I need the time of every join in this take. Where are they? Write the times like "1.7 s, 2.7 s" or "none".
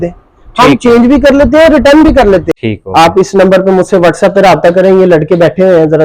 2.5 s